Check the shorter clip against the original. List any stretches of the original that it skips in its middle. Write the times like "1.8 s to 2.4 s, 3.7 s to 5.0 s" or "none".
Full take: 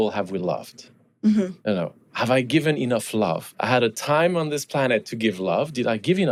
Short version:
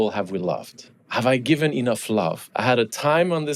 1.0 s to 2.0 s